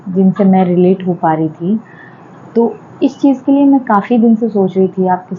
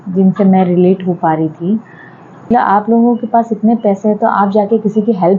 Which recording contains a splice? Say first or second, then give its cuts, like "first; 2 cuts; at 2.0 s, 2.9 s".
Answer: second; 1 cut; at 2.5 s